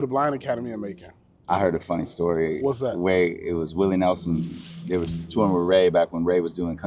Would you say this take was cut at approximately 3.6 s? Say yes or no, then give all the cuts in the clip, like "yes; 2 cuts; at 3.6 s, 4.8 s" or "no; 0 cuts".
no; 1 cut; at 1.5 s